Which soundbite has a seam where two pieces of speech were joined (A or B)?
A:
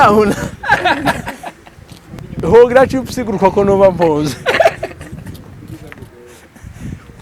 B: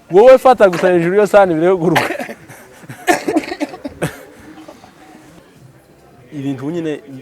B